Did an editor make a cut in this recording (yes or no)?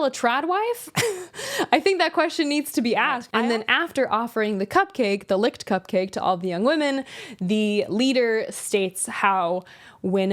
yes